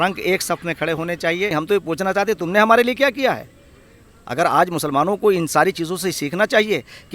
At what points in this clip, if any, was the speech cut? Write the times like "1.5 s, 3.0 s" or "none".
1.5 s

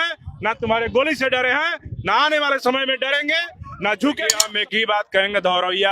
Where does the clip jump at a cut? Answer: 4.5 s

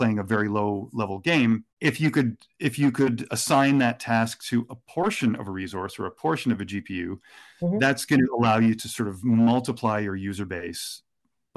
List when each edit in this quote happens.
1.7 s

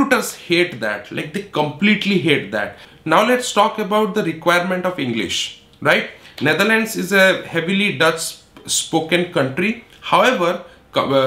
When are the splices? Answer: 2.8 s

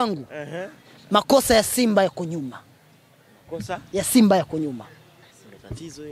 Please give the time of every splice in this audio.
none

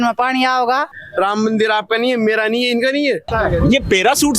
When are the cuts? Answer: 1.0 s, 3.3 s

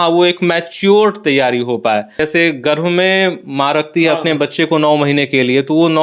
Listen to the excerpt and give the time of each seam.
2.2 s

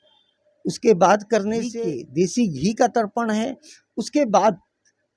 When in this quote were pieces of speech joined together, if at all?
1.8 s

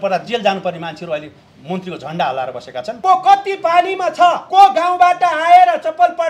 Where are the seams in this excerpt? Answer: 2.9 s, 4.4 s

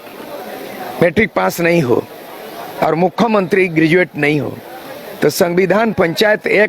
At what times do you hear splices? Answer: none

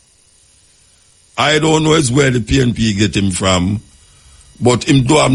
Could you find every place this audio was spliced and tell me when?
none

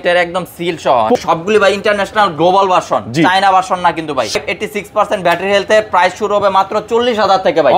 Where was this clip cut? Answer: 1.2 s, 4.3 s

